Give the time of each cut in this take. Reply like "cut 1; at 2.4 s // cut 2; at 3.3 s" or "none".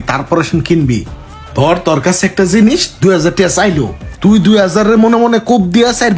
none